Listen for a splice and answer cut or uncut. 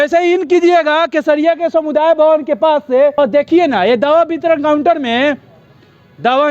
cut